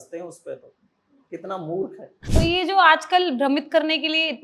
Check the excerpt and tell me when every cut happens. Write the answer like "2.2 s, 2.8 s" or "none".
2.1 s

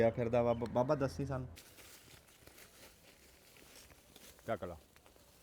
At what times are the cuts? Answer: 1.6 s

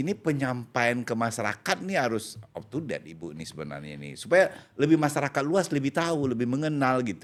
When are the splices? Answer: none

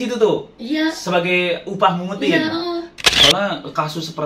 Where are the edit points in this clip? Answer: 3.1 s

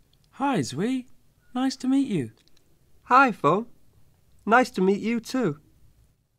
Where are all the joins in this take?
none

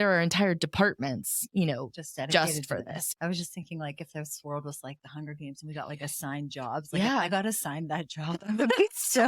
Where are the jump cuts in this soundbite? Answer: 3.0 s

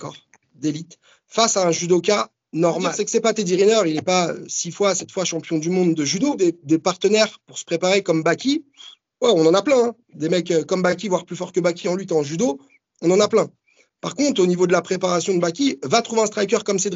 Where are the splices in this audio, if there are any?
2.9 s, 6.3 s

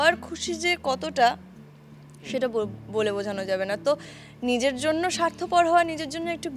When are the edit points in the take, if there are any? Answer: none

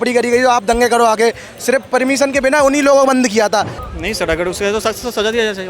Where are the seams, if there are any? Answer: 3.7 s

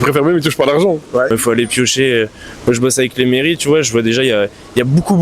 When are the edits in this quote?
1.3 s

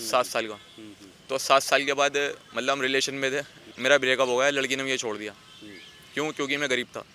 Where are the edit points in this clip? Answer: 3.6 s

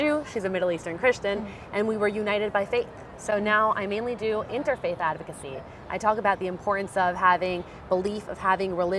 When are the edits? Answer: none

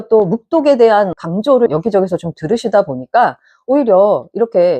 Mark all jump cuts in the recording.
none

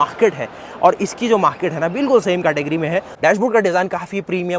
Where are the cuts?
3.1 s

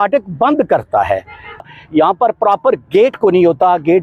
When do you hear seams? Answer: 1.6 s

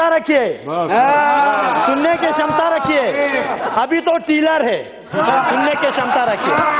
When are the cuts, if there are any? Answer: none

